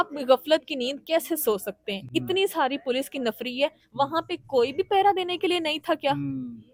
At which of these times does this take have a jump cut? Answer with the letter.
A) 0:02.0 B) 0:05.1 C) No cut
C